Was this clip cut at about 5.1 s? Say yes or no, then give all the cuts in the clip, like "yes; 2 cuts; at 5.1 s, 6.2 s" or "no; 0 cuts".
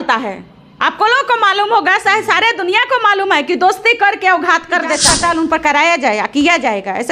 yes; 1 cut; at 5.1 s